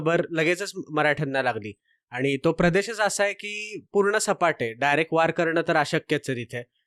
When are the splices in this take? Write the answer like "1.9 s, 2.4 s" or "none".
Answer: none